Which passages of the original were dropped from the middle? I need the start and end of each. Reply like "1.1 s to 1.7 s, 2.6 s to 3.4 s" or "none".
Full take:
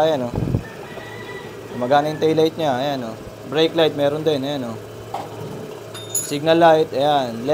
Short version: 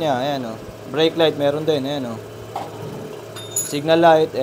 none